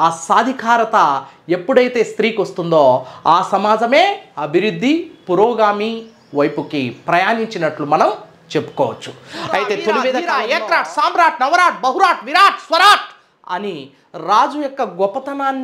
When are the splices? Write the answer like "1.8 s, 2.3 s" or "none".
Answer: 10.3 s